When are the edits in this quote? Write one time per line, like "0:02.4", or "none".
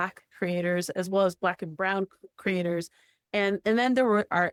none